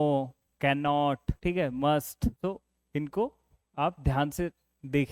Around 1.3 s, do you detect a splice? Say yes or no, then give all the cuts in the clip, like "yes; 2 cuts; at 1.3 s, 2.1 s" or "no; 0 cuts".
yes; 2 cuts; at 1.3 s, 2.4 s